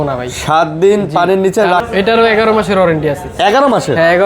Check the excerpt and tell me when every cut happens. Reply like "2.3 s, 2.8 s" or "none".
1.8 s